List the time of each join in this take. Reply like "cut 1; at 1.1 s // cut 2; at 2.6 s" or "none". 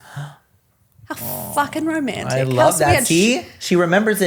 none